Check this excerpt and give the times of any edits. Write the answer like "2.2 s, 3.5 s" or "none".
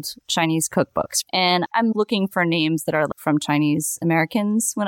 1.3 s, 3.1 s

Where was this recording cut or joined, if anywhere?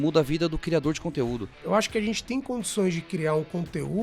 1.5 s

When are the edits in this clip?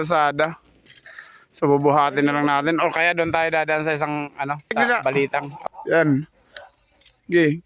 5.6 s

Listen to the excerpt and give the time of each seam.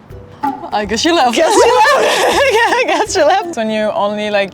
3.5 s

